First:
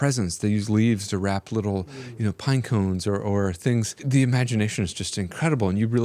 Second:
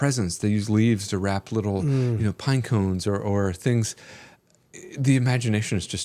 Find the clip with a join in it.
first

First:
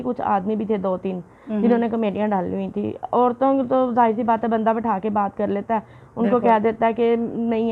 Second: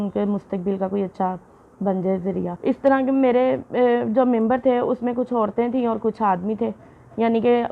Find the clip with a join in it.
second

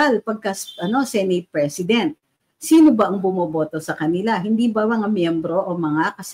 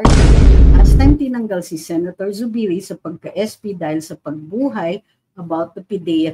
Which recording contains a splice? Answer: second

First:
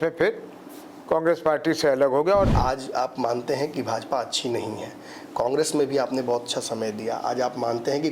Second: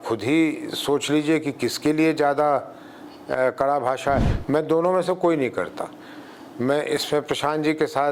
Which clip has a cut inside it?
first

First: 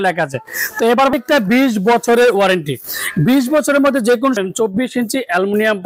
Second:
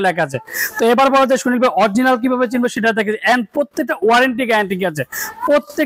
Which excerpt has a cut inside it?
first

